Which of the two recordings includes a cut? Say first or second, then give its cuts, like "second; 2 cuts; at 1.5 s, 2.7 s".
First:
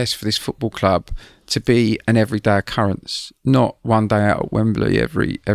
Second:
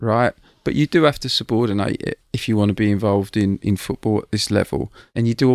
second; 1 cut; at 3.6 s